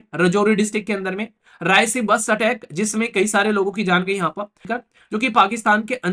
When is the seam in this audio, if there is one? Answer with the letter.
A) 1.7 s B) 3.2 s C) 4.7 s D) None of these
C